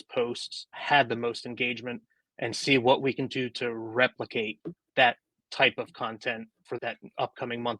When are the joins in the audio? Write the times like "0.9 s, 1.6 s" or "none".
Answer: 6.8 s